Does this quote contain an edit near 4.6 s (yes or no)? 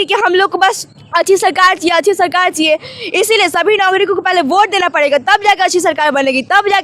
no